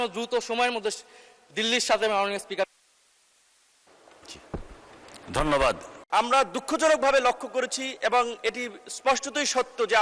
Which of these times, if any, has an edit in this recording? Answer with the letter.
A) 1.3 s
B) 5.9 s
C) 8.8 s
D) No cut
B